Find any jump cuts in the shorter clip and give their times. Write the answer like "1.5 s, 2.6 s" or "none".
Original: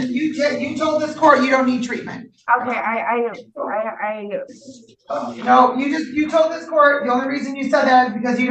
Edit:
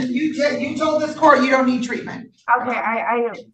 none